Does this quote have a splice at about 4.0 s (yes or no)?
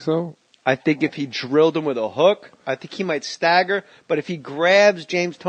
no